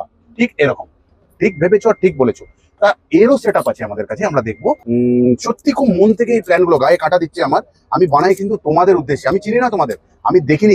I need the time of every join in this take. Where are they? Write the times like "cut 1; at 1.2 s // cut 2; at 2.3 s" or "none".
cut 1; at 4.8 s